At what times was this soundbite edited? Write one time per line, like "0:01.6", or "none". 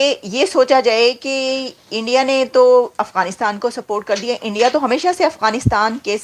none